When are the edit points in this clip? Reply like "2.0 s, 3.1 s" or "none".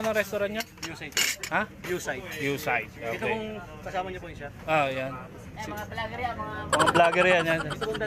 none

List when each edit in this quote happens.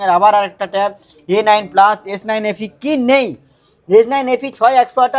none

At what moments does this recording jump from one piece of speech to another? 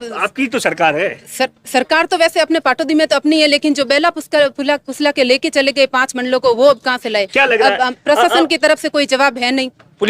none

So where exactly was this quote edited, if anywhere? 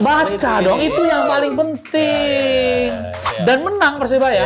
3.3 s

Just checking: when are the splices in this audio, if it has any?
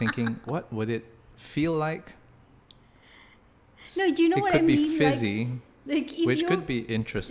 none

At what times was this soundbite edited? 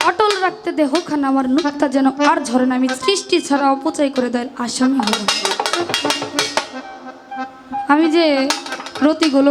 none

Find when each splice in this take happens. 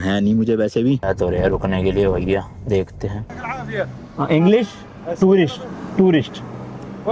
1.0 s, 3.7 s

